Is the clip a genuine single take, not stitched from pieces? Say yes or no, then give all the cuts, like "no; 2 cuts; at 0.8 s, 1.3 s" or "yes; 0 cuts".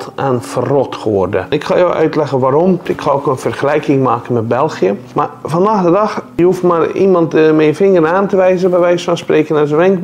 no; 4 cuts; at 1.5 s, 2.9 s, 5.0 s, 6.2 s